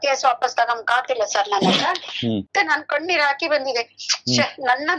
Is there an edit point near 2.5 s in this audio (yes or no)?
yes